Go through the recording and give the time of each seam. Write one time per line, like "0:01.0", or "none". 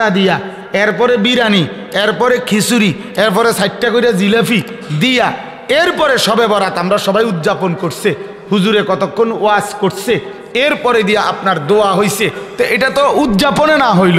none